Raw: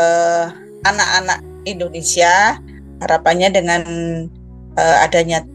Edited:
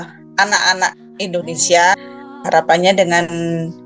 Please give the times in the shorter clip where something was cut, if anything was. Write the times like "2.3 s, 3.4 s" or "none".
2.0 s